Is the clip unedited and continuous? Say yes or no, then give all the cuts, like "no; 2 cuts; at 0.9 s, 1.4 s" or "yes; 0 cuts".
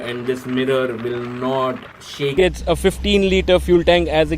no; 1 cut; at 2.3 s